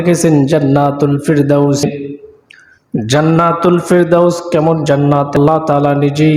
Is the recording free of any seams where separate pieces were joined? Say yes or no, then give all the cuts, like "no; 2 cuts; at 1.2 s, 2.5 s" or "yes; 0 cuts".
no; 2 cuts; at 1.8 s, 5.4 s